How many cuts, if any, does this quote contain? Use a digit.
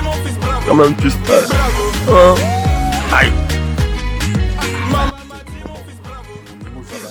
0